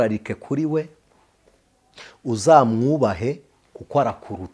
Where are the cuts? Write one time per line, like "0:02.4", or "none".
none